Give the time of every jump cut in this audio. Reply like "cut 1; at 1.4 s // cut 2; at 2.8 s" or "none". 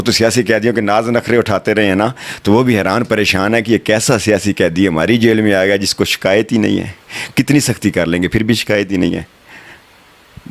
none

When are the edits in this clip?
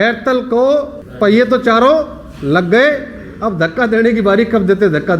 cut 1; at 1.0 s

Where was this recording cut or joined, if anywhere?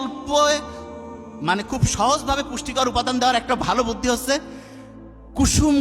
none

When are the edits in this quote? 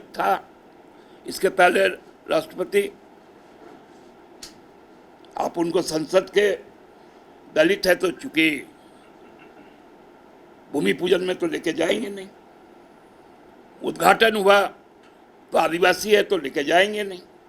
cut 1; at 13.5 s

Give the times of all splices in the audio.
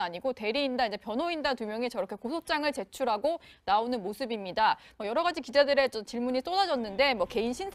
none

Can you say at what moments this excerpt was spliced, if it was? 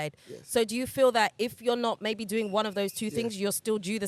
none

